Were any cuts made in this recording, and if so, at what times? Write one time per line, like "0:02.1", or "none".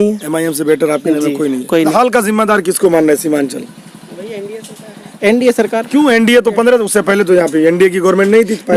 none

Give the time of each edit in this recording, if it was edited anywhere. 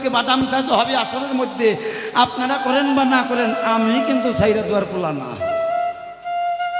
none

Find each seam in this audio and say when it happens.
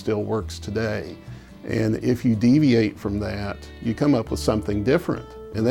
none

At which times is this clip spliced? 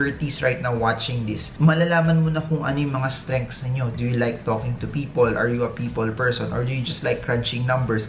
none

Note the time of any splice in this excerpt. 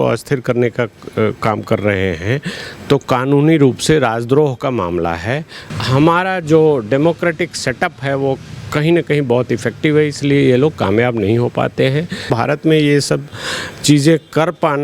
0:05.7
0:12.3

